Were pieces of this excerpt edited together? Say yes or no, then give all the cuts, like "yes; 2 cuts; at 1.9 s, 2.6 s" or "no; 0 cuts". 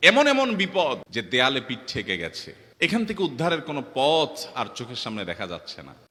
no; 0 cuts